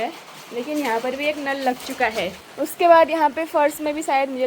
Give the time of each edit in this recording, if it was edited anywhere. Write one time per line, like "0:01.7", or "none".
0:02.4